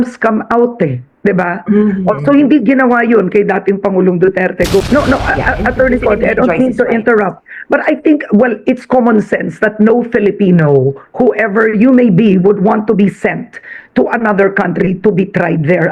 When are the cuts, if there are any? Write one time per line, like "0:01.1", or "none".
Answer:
0:04.8